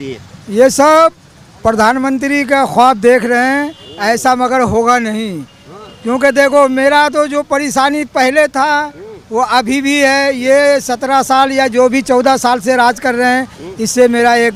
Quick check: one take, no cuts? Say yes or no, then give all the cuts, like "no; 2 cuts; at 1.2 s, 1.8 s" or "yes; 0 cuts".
yes; 0 cuts